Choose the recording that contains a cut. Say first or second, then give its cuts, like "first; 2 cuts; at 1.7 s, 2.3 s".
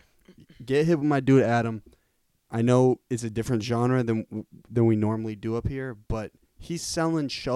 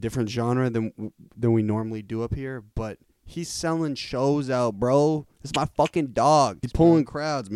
second; 1 cut; at 6.6 s